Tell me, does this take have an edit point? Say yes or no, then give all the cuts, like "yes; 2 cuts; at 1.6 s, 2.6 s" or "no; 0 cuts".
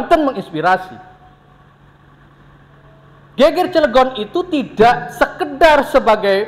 no; 0 cuts